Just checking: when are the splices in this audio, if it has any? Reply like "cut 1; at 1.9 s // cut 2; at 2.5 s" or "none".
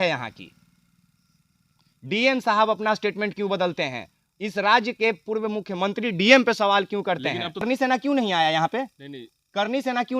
cut 1; at 7.6 s